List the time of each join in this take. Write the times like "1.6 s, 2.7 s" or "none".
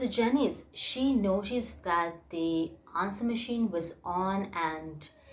none